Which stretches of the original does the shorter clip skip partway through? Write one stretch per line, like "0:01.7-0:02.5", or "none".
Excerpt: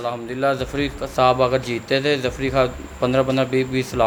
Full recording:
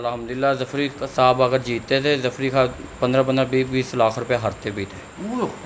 none